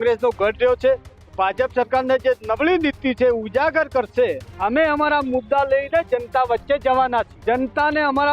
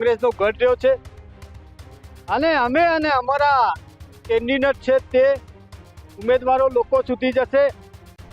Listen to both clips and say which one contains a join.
first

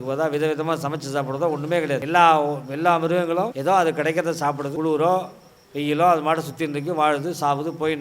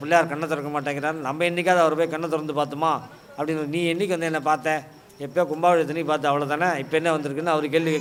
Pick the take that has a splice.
first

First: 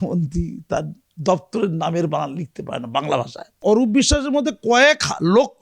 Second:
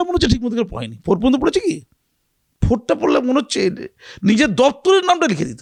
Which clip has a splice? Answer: first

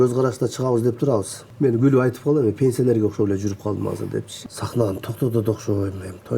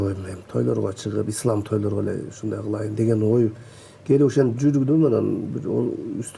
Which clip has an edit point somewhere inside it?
first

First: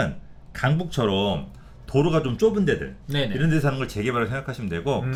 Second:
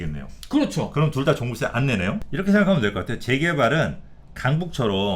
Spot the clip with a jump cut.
second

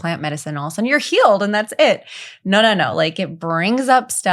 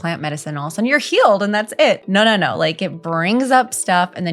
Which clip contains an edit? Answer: second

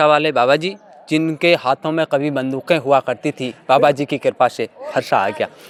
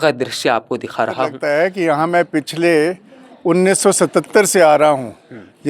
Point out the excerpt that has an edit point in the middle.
second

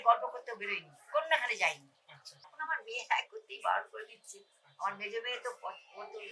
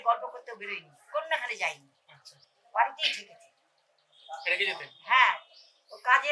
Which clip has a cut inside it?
first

